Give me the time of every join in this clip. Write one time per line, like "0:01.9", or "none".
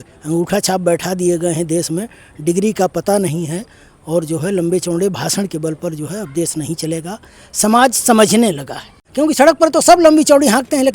0:09.1